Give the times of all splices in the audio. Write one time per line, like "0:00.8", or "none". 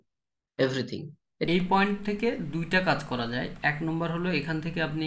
0:01.5